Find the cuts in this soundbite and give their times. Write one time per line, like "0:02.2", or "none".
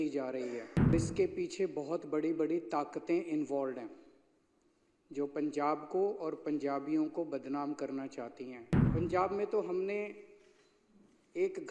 0:00.9
0:08.7